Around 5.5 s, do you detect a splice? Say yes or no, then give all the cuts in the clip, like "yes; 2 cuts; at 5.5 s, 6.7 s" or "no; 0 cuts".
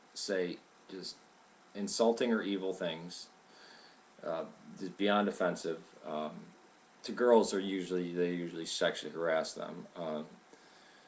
yes; 1 cut; at 5.5 s